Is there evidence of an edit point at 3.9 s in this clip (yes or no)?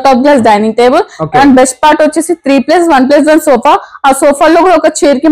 no